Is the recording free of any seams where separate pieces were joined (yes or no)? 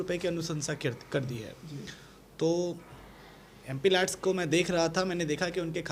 yes